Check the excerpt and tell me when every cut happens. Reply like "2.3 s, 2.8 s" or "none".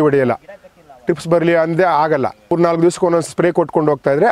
2.5 s